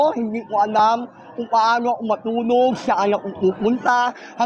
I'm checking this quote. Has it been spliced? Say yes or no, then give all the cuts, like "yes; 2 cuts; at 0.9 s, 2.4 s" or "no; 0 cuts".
no; 0 cuts